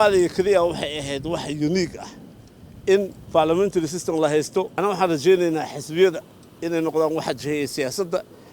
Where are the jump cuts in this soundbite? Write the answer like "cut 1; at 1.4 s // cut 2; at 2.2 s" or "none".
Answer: cut 1; at 4.7 s